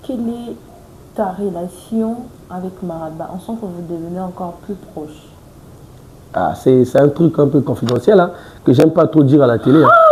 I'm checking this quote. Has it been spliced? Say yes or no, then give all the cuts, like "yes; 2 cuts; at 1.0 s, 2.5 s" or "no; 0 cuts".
no; 0 cuts